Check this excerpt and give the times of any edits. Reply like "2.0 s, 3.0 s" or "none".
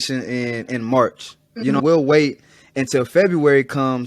1.8 s